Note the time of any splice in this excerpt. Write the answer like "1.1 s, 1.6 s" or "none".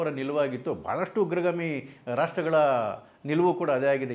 none